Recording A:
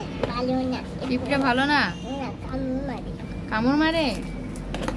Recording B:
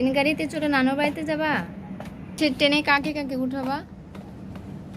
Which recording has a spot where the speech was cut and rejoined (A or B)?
B